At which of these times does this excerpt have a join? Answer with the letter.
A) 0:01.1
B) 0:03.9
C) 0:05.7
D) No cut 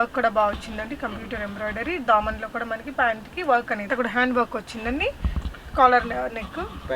B